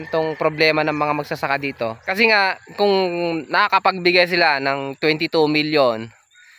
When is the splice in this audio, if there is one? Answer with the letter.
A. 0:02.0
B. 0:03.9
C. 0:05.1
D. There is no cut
A